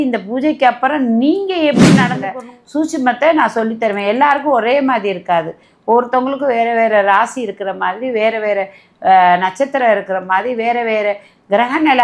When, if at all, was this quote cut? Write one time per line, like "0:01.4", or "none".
0:02.2